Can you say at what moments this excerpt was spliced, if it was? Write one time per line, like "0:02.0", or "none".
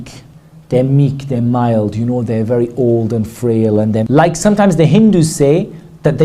0:04.1